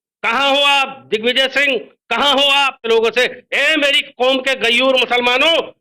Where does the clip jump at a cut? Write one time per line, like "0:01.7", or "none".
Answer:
0:02.9